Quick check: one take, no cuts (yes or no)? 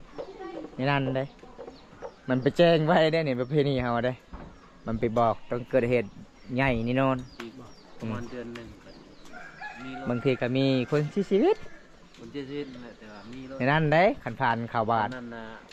yes